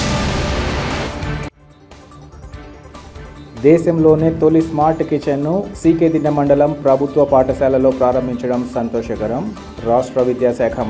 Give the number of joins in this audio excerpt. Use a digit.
1